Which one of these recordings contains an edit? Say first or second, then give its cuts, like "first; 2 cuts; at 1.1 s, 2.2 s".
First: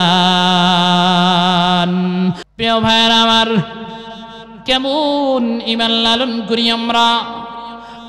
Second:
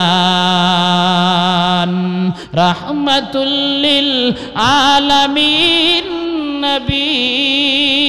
first; 1 cut; at 2.4 s